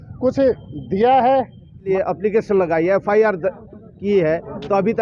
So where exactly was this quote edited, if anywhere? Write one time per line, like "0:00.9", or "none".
0:01.9